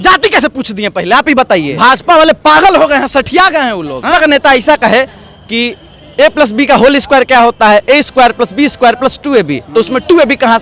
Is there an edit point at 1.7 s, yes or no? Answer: yes